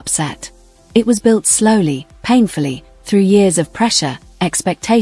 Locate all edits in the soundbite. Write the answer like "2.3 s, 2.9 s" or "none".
none